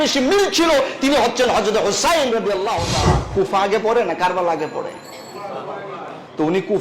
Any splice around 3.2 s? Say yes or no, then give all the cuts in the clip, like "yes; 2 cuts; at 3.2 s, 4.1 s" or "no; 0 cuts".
yes; 1 cut; at 3.2 s